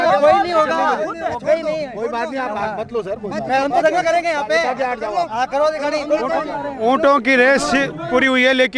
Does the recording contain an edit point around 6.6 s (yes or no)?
no